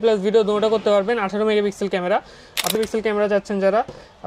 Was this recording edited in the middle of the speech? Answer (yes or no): yes